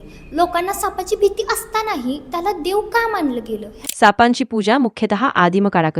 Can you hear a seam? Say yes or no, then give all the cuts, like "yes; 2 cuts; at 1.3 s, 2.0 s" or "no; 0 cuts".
yes; 1 cut; at 3.8 s